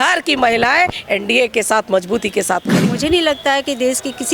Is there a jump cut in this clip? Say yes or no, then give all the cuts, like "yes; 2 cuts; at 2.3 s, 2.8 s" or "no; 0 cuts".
yes; 1 cut; at 2.9 s